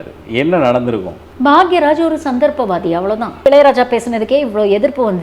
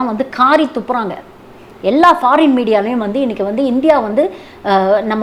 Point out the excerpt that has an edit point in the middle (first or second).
first